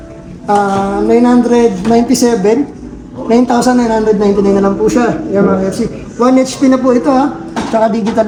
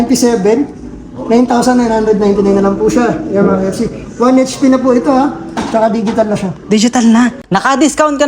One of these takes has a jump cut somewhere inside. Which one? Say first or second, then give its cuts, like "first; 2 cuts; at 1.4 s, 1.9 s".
second; 1 cut; at 7.4 s